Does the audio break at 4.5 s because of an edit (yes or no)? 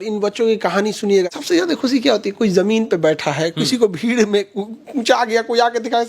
no